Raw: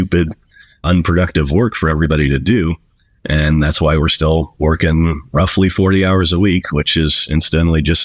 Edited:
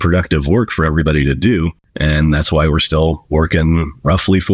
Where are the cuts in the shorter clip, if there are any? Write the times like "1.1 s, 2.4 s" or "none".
1.8 s